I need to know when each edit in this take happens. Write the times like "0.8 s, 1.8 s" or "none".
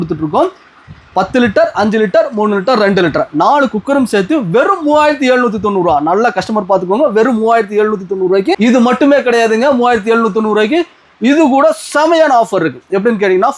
8.6 s